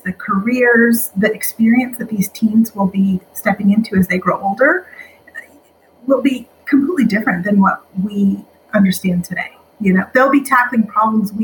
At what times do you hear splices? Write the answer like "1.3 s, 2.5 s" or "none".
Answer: none